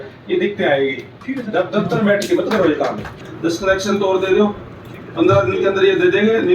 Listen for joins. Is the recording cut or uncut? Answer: cut